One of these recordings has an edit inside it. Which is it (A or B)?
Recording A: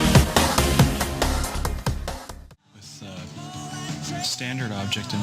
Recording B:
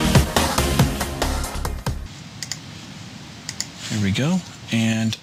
A